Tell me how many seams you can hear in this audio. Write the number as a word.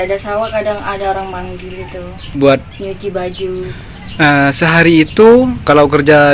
two